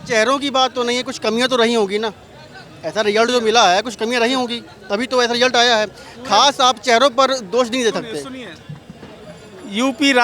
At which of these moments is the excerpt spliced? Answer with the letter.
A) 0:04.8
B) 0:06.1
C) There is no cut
C